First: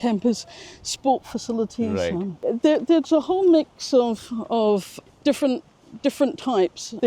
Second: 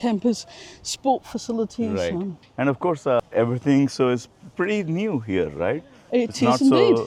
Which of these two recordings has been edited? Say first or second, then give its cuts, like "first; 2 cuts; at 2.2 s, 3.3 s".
first; 1 cut; at 2.4 s